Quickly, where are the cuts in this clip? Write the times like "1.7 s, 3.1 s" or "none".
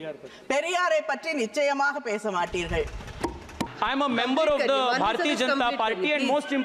3.7 s